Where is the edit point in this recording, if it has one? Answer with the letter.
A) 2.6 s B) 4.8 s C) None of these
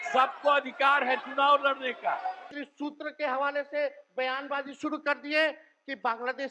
A